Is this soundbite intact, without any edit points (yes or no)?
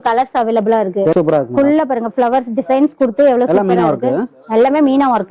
no